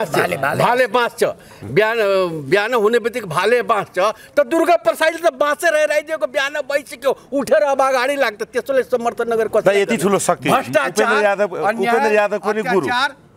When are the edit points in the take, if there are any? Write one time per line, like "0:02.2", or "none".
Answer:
none